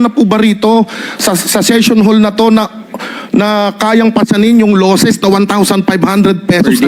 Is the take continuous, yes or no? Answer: yes